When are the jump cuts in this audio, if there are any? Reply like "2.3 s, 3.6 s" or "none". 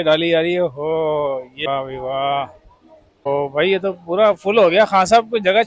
1.7 s, 3.3 s